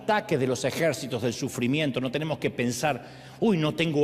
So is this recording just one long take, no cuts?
yes; 0 cuts

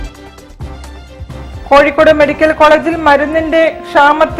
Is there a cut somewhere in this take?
yes; 1 cut; at 1.2 s

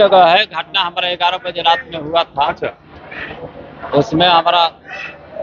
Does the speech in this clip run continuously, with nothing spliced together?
yes; 0 cuts

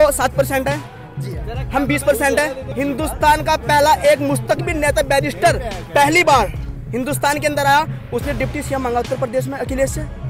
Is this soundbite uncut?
no; 1 cut; at 2.7 s

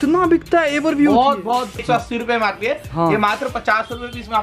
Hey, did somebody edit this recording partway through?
yes; 1 cut; at 1.8 s

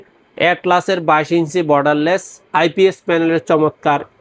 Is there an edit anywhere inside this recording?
no; 0 cuts

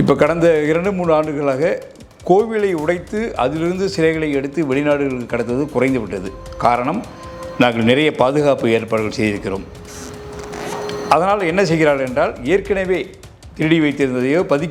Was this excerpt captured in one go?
yes; 0 cuts

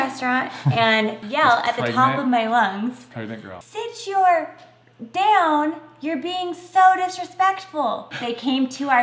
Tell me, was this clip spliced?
yes; 2 cuts; at 3.5 s, 8.1 s

